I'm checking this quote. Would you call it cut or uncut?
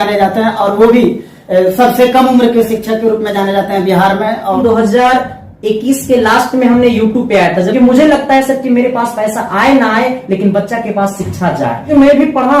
cut